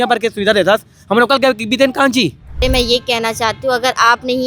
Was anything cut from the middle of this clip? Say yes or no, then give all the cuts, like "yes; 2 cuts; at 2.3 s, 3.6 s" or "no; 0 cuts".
yes; 1 cut; at 2.4 s